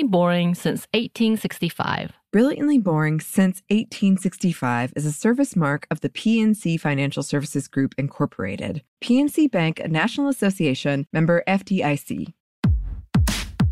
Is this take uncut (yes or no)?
no